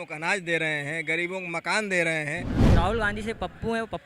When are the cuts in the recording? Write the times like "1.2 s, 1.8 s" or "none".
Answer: 2.5 s

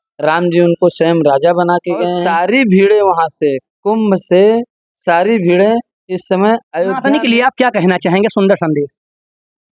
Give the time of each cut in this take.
2.2 s, 7.0 s

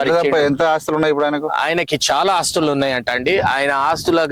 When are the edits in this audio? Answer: none

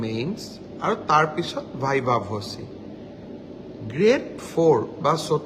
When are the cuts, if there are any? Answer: none

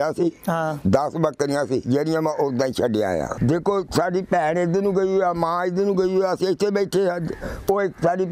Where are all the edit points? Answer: 3.3 s

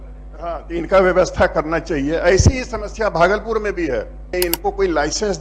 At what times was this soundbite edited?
4.4 s

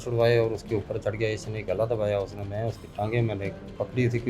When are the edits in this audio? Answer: none

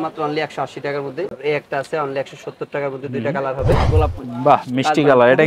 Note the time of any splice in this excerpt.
1.3 s, 3.8 s

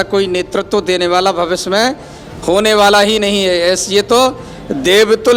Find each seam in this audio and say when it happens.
none

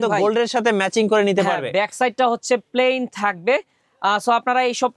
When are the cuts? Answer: none

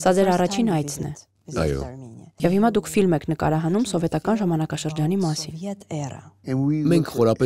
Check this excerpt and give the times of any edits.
2.3 s, 6.8 s

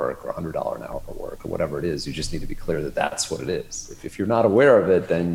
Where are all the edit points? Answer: none

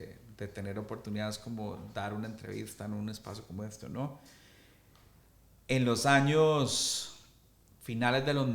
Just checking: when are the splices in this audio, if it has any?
none

